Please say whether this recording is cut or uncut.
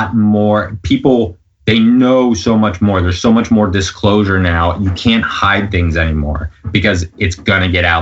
uncut